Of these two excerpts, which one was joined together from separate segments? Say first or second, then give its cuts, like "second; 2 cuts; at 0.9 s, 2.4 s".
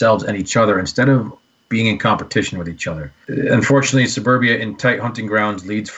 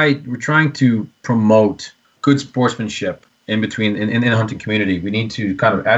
first; 1 cut; at 3.2 s